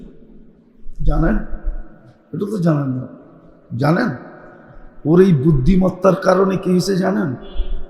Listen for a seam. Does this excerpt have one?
no; 0 cuts

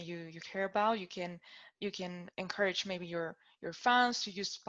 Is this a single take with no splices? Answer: yes; 0 cuts

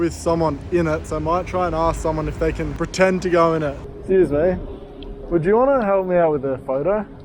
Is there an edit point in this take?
yes; 2 cuts; at 1.1 s, 3.9 s

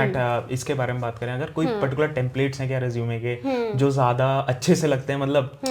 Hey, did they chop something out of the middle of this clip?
no; 0 cuts

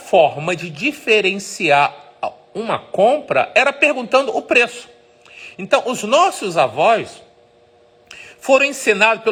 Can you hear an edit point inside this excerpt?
no; 0 cuts

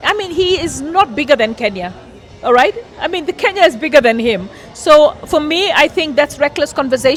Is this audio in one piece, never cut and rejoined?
yes; 0 cuts

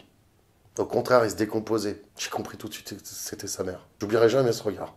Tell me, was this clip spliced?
yes; 2 cuts; at 2.1 s, 4.0 s

